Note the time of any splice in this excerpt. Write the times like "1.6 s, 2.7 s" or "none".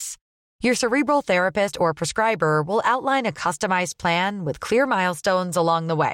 none